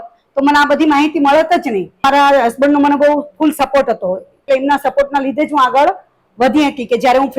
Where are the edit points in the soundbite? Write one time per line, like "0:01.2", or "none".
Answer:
0:02.0
0:04.4